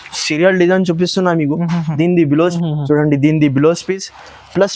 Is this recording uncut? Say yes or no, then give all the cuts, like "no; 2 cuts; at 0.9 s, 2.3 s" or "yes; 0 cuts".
no; 1 cut; at 2.5 s